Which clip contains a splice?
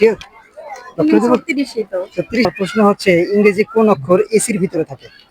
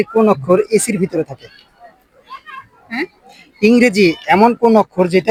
first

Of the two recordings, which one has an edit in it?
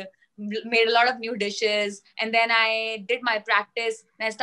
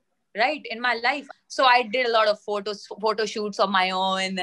second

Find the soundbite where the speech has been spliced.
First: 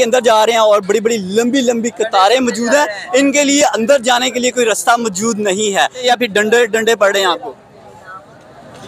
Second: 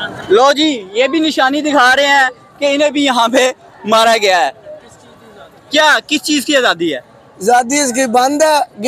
first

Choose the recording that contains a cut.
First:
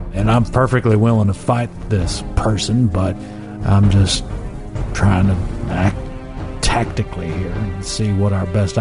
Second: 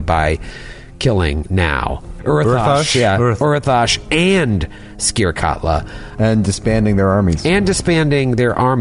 second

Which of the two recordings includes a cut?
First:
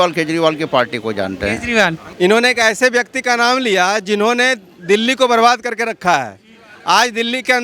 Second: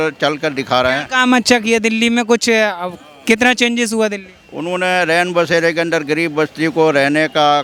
first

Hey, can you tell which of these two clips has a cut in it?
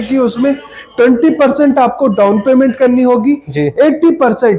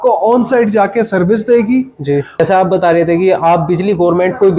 second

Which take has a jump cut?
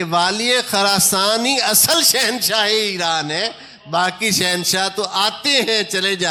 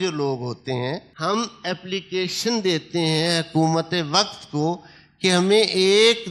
second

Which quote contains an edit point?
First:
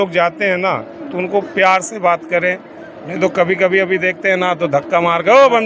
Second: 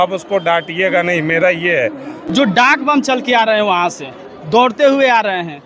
second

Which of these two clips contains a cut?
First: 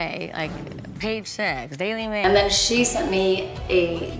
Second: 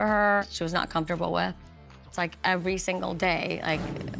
first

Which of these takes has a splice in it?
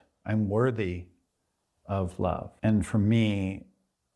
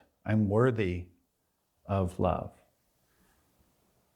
first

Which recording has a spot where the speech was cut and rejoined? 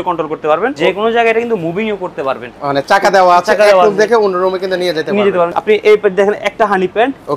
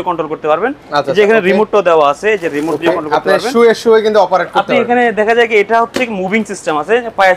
first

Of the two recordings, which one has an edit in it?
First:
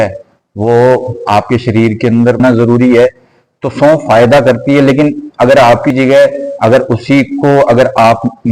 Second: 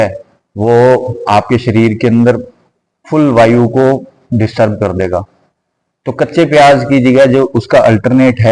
first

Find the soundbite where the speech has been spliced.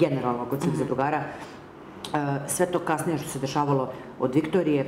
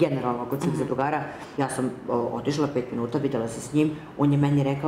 second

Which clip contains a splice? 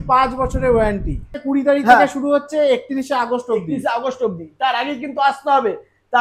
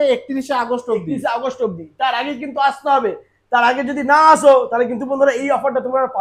first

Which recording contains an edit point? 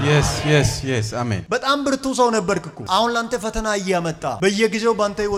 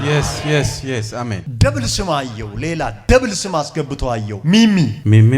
second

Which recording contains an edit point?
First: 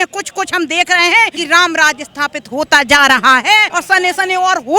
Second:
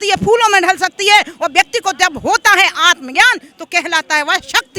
first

